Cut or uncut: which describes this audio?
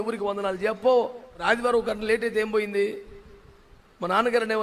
cut